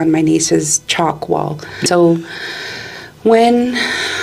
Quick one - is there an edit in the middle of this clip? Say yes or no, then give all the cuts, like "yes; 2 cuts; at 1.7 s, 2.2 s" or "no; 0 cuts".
yes; 1 cut; at 1.8 s